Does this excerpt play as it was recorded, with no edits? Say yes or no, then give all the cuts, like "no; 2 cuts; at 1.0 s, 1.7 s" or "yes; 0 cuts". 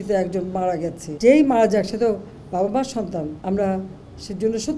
no; 2 cuts; at 1.0 s, 3.4 s